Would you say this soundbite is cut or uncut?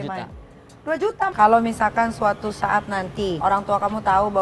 cut